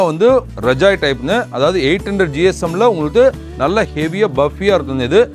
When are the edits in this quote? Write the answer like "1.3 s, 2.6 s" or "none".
none